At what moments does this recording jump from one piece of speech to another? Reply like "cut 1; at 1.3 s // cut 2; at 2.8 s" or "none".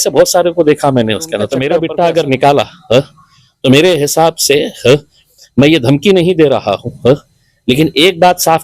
cut 1; at 1.7 s